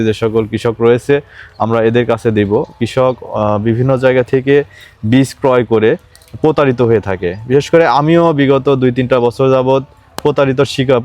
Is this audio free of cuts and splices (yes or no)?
no